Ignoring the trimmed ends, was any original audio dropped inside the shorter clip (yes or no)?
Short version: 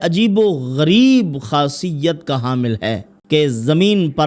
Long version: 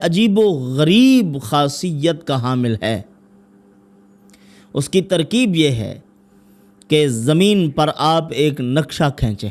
yes